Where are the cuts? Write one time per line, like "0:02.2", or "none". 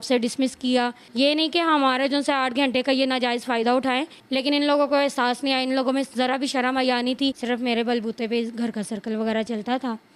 0:01.0
0:04.2
0:07.4